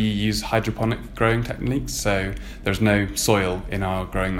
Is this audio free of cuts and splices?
yes; 0 cuts

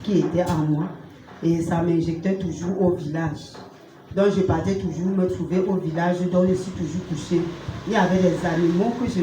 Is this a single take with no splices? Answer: yes; 0 cuts

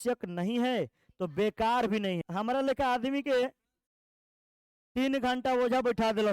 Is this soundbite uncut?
no; 1 cut; at 2.2 s

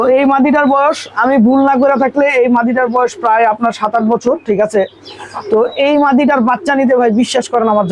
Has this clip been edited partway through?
no; 0 cuts

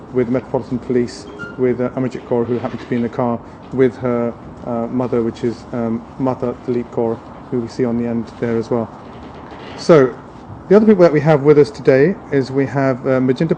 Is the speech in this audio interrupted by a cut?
yes; 1 cut; at 11.8 s

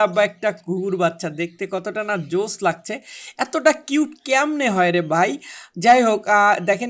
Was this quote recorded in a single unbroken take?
yes; 0 cuts

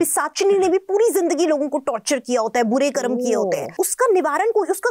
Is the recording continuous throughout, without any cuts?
no; 1 cut; at 3.7 s

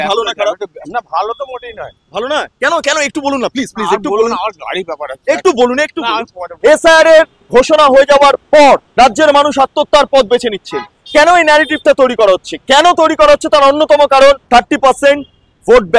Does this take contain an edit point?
yes; 4 cuts; at 6.4 s, 7.4 s, 8.9 s, 14.4 s

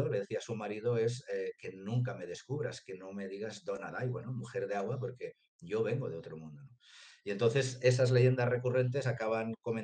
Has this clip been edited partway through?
no; 0 cuts

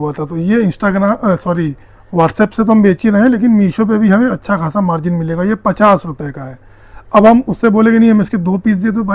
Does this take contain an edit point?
no; 0 cuts

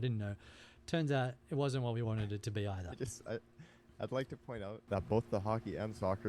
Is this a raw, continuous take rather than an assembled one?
no; 1 cut; at 4.8 s

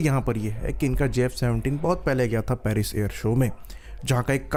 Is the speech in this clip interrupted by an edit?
no; 0 cuts

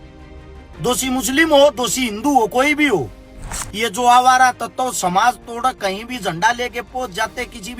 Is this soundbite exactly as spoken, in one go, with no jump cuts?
no; 1 cut; at 3.6 s

